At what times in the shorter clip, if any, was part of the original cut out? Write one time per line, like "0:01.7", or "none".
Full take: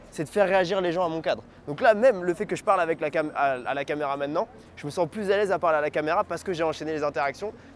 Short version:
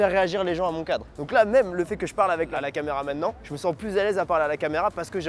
0:01.1
0:02.5
0:03.5